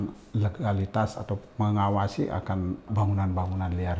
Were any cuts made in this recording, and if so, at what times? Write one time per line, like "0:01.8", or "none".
0:02.9